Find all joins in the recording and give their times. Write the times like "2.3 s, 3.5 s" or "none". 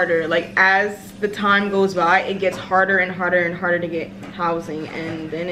none